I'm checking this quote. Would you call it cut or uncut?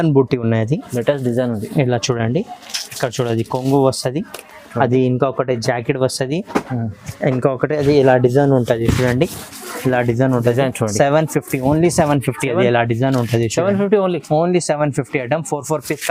uncut